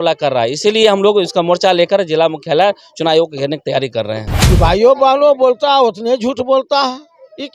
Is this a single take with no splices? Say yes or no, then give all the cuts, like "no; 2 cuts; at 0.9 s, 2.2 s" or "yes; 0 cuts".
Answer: no; 1 cut; at 4.5 s